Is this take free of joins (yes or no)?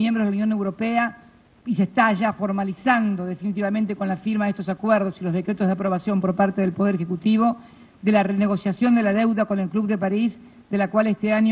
yes